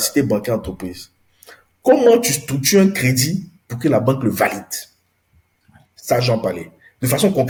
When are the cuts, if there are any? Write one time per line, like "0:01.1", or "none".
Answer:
none